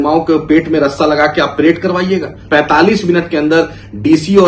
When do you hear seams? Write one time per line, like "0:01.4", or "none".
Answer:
0:02.3